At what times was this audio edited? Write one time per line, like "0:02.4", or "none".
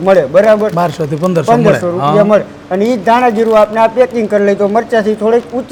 none